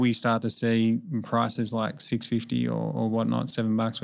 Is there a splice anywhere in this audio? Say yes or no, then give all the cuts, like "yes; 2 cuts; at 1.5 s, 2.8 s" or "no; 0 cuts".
no; 0 cuts